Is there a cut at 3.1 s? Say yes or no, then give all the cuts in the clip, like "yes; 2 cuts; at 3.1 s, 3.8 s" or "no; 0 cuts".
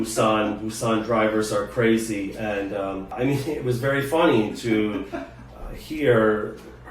yes; 1 cut; at 3.1 s